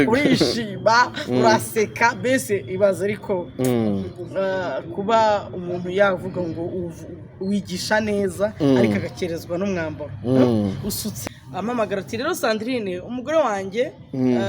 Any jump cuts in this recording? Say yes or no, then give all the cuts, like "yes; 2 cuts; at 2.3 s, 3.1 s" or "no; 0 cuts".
yes; 1 cut; at 11.1 s